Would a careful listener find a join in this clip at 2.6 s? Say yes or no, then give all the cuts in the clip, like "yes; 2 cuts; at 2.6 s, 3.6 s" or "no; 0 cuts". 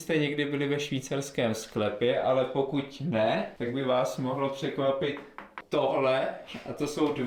no; 0 cuts